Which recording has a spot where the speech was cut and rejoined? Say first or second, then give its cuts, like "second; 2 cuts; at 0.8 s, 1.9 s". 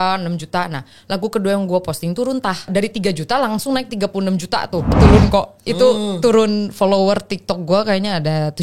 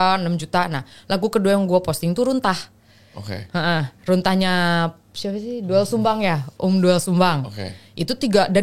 first; 2 cuts; at 2.7 s, 5.0 s